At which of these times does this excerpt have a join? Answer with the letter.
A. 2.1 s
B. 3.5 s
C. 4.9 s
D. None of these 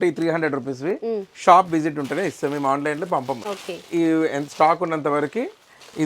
B